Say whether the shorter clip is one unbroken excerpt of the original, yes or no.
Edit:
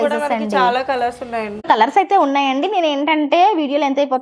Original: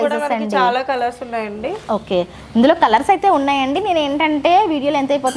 no